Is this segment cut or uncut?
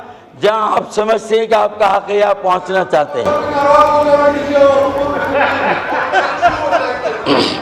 uncut